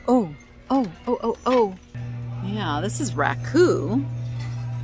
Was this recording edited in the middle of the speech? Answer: yes; 1 cut; at 1.9 s

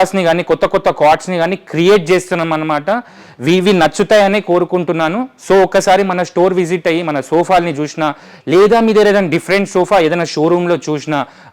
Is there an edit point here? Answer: no; 0 cuts

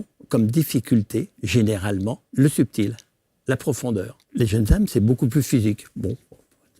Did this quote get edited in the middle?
yes; 2 cuts; at 2.2 s, 4.2 s

